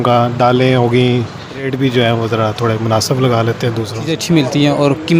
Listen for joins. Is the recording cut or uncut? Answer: cut